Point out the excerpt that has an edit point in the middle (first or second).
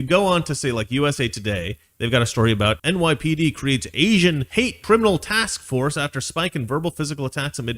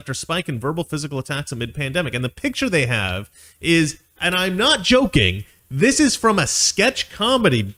first